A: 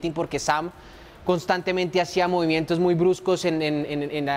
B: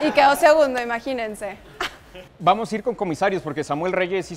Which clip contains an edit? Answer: B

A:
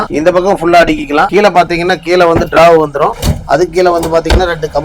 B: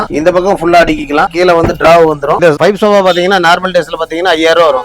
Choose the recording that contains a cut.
B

